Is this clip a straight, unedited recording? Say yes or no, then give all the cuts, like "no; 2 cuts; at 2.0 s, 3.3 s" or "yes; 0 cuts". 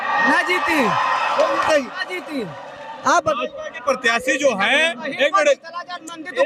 yes; 0 cuts